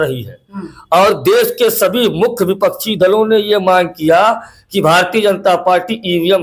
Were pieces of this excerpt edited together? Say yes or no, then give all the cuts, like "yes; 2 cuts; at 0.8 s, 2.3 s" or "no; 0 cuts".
no; 0 cuts